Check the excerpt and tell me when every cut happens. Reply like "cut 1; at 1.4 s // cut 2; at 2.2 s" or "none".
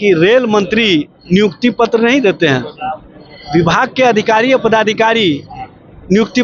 none